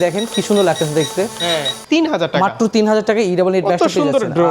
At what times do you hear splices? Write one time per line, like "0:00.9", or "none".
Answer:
0:01.7